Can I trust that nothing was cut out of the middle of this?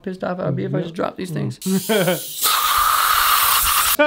no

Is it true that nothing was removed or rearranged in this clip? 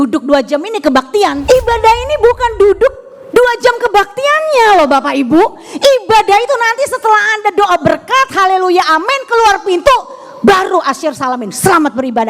no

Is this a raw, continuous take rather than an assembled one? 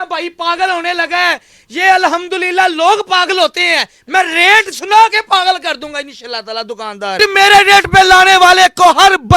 no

